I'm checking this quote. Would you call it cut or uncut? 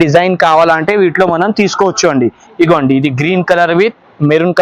uncut